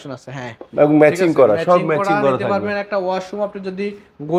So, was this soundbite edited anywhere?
no; 0 cuts

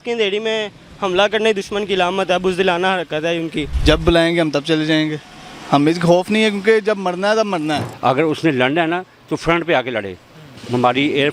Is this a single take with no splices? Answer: no; 2 cuts; at 3.7 s, 7.9 s

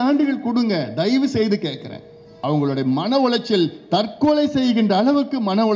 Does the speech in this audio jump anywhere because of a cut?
yes; 1 cut; at 2.3 s

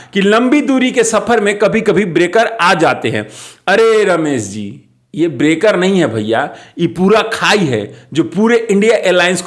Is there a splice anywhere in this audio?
no; 0 cuts

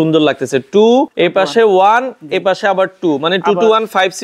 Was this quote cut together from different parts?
yes; 1 cut; at 1.1 s

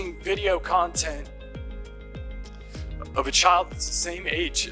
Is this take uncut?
no; 2 cuts; at 1.2 s, 3.1 s

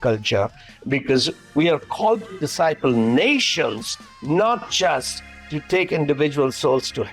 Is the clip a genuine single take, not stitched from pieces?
yes; 0 cuts

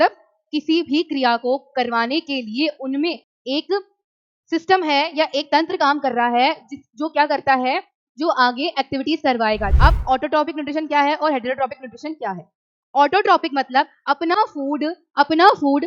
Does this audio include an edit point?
yes; 2 cuts; at 3.3 s, 9.7 s

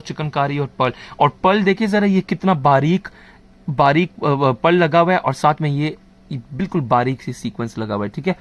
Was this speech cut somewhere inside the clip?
no; 0 cuts

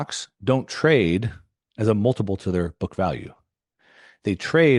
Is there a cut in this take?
no; 0 cuts

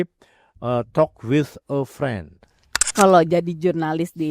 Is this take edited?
yes; 1 cut; at 2.9 s

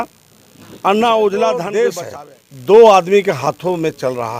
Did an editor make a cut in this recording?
yes; 1 cut; at 2.0 s

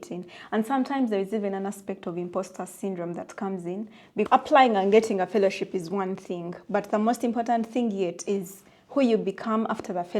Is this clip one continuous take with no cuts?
no; 1 cut; at 4.3 s

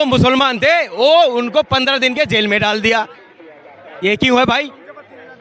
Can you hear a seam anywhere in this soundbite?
no; 0 cuts

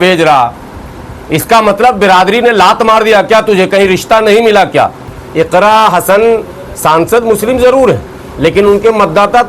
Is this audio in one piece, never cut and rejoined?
no; 1 cut; at 5.0 s

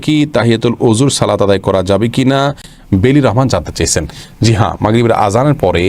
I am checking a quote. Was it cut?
no; 0 cuts

